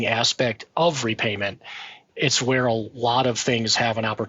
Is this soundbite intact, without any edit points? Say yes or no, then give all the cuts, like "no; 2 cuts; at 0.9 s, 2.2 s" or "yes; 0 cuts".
no; 1 cut; at 2.0 s